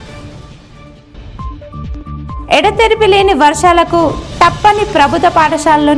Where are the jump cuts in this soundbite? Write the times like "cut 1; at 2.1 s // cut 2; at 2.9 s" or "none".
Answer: cut 1; at 1.0 s